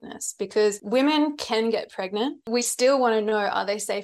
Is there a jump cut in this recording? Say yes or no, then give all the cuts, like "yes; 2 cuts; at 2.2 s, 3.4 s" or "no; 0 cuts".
yes; 2 cuts; at 0.8 s, 2.4 s